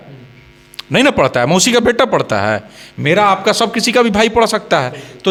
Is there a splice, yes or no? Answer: no